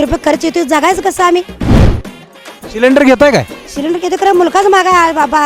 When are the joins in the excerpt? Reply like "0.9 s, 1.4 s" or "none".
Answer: none